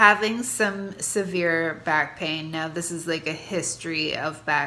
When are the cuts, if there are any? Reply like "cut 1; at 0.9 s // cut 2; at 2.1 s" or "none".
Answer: none